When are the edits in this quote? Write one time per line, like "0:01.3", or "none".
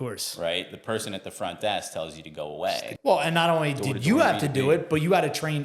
0:02.9